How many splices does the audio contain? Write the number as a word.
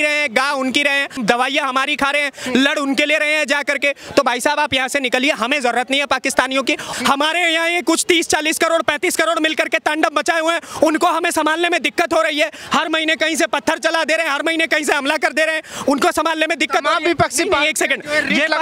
two